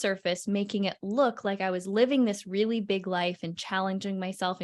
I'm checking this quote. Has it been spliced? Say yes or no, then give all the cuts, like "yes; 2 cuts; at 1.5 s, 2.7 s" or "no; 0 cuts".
no; 0 cuts